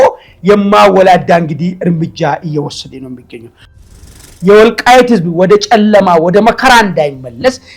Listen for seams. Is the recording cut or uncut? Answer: cut